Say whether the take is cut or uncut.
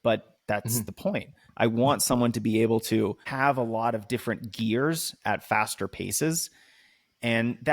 cut